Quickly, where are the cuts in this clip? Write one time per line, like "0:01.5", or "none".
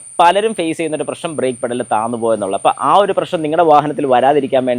none